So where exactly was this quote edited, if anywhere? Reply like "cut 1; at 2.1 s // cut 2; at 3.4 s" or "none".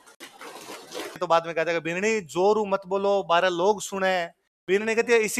cut 1; at 1.2 s